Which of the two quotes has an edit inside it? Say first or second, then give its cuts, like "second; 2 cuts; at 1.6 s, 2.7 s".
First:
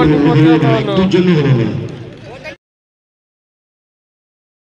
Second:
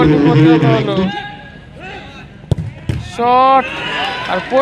second; 1 cut; at 1.1 s